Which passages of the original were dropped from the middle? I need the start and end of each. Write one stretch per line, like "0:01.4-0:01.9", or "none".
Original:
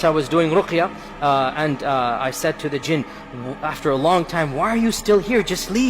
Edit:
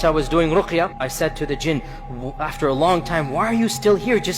0:01.0-0:02.3

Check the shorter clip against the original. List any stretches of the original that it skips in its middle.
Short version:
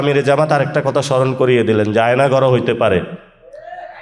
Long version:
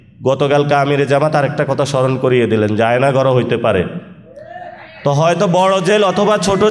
none

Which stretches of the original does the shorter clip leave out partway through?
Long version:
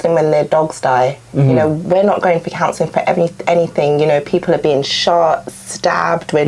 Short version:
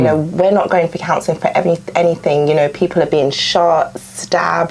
none

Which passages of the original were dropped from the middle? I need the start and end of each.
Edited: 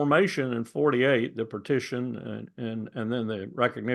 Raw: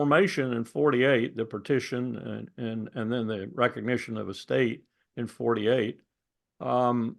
none

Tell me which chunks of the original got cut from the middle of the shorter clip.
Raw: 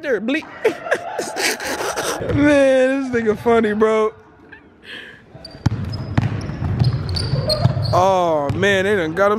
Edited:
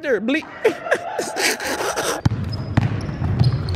0:02.2-0:05.6

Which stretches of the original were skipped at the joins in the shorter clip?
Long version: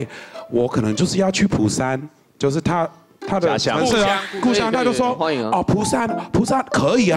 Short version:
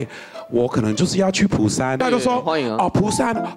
0:02.0-0:04.7

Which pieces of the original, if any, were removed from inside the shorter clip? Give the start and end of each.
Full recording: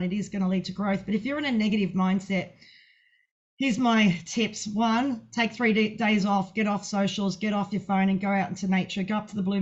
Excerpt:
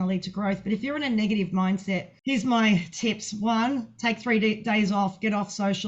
0:02.5-0:03.5

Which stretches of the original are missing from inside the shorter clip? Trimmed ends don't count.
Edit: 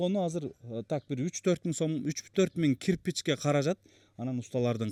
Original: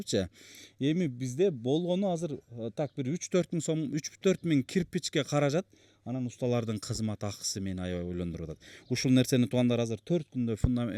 none

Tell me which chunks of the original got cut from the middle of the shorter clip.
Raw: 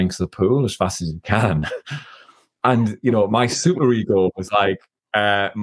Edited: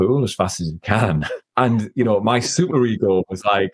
0:01.8-0:02.5

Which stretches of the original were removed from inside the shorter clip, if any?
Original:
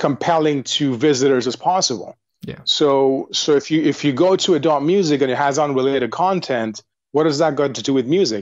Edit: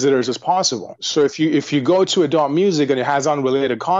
0:02.2-0:03.3

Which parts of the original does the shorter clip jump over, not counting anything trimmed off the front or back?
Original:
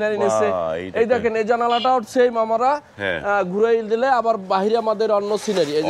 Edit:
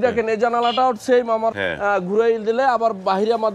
0:02.6-0:03.0

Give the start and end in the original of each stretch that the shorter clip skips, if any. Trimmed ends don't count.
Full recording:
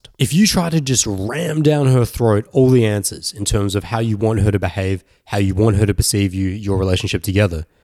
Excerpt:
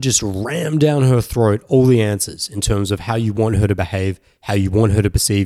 none

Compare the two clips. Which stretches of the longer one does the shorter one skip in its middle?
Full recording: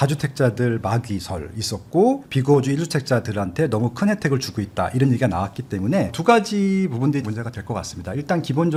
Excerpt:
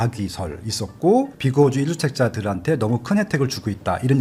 none

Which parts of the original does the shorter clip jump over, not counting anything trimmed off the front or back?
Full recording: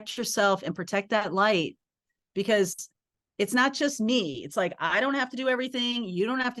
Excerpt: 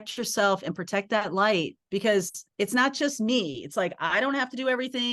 0:01.8-0:02.2
0:02.8-0:03.2

